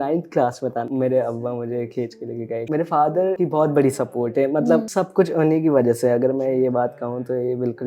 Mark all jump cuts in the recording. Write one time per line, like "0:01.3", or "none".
0:00.9
0:02.6
0:03.4
0:04.9